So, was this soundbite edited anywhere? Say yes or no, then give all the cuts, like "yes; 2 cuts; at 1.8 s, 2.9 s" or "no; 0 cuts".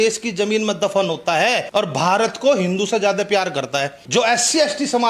yes; 2 cuts; at 1.6 s, 4.0 s